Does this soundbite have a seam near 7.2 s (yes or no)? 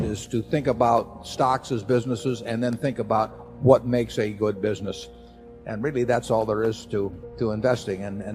yes